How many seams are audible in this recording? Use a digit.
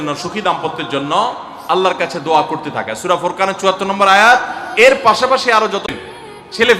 1